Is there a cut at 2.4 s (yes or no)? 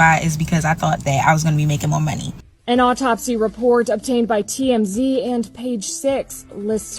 yes